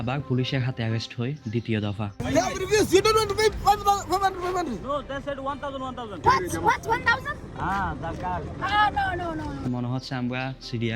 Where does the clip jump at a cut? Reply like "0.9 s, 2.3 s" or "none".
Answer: 2.1 s, 6.2 s, 9.6 s